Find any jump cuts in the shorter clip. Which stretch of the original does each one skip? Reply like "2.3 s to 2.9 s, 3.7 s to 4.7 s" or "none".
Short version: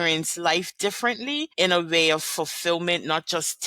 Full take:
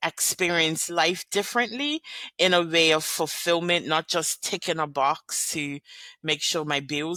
2.0 s to 2.3 s